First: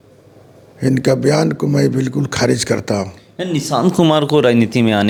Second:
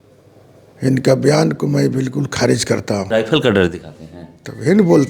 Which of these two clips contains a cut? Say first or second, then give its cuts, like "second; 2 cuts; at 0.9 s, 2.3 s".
second; 1 cut; at 3.1 s